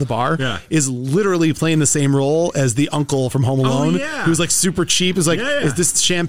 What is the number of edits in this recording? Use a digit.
0